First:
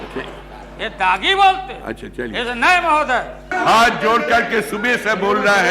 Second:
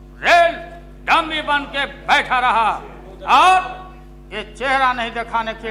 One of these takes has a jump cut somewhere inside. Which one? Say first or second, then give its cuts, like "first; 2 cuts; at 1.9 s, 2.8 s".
first; 1 cut; at 3.4 s